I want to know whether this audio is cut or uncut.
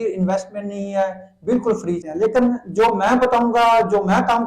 cut